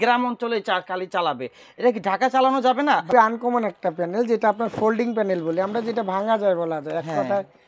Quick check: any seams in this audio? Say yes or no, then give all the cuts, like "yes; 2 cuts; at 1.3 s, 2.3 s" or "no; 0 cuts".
yes; 1 cut; at 3.1 s